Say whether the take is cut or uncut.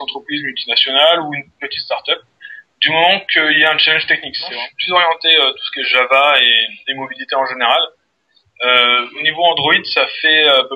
cut